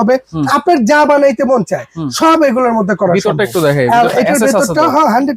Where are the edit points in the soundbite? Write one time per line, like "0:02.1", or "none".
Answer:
none